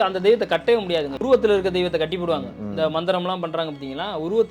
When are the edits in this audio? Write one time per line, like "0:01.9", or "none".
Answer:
0:01.1